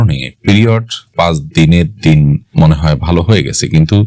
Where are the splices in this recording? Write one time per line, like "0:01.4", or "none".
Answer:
0:02.5